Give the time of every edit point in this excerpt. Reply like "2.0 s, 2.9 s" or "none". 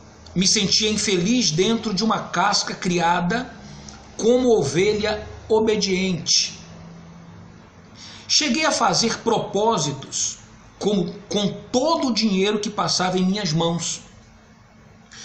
1.1 s